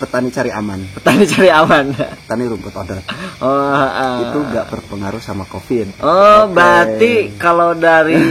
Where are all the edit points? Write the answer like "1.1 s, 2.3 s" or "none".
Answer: none